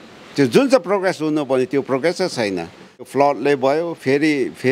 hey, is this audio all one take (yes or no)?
no